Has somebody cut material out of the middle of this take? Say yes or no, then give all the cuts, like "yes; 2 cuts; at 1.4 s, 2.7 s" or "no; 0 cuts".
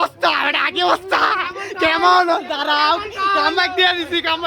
no; 0 cuts